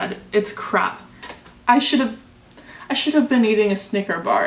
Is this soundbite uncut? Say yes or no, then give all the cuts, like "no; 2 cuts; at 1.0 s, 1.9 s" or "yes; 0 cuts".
no; 1 cut; at 1.3 s